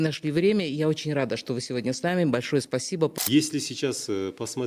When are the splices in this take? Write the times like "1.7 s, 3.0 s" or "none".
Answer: 3.1 s